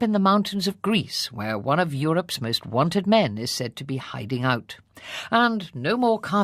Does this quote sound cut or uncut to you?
cut